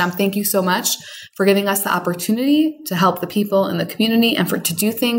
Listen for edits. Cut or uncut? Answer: uncut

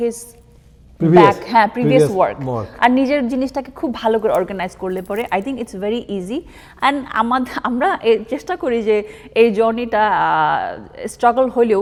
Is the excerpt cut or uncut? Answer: uncut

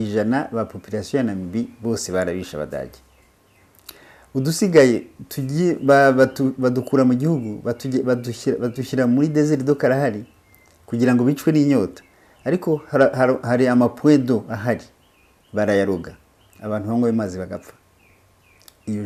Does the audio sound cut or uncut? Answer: uncut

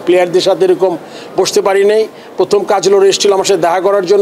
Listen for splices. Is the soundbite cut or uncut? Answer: uncut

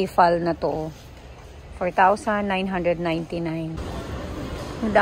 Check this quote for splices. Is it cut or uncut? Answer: cut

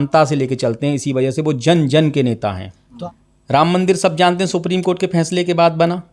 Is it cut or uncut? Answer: cut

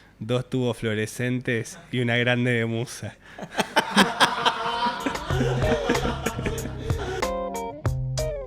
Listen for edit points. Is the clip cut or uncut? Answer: cut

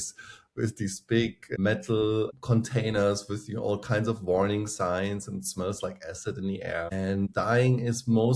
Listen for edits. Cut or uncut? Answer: cut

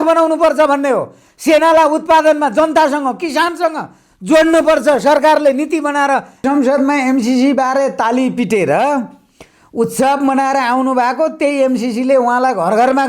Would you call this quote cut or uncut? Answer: cut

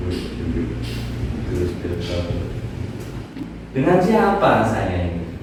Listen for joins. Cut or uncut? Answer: uncut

